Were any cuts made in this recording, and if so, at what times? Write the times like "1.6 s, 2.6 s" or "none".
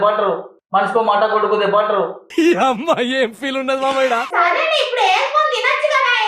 4.3 s